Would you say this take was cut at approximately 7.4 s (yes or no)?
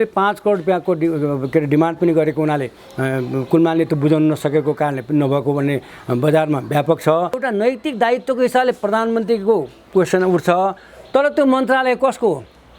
yes